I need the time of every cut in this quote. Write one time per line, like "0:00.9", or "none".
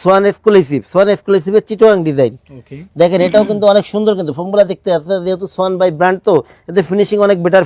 none